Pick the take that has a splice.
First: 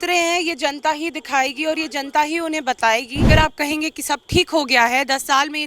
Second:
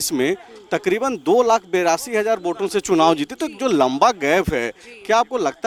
first; 1 cut; at 3.3 s

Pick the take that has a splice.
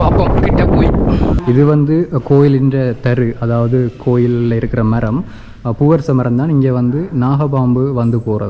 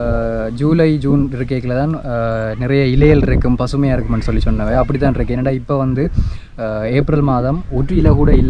first; 1 cut; at 1.4 s

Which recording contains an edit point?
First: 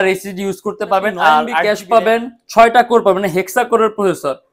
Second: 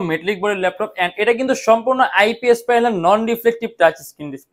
first; 1 cut; at 1.6 s

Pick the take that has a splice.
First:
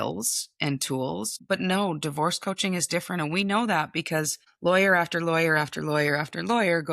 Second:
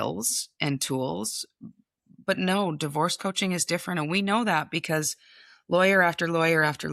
first; 2 cuts; at 1.4 s, 4.4 s

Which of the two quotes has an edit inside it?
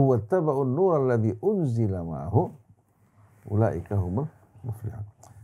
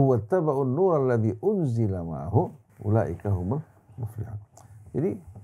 second; 1 cut; at 2.7 s

